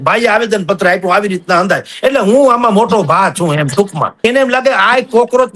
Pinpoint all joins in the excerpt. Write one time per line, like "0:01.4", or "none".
0:04.1